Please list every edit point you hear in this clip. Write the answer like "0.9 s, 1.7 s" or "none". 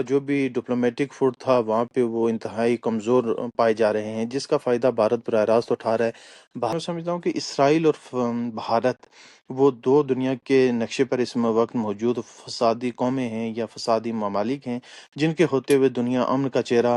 6.7 s